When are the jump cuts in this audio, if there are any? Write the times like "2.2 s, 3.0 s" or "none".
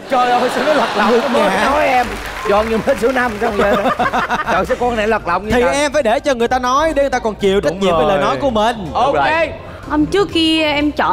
none